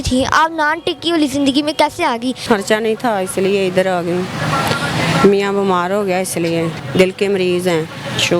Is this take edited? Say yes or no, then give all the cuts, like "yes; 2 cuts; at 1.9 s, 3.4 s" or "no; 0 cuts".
yes; 2 cuts; at 2.4 s, 6.8 s